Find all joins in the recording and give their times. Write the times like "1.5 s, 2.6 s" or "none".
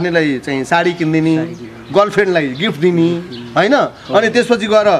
none